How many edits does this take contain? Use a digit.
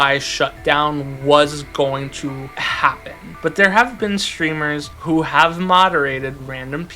2